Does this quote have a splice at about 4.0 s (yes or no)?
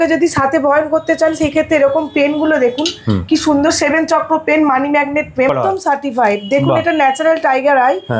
no